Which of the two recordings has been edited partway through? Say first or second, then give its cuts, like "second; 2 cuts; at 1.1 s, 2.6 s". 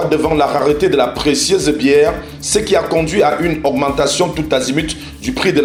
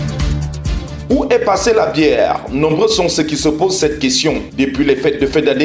second; 1 cut; at 0.9 s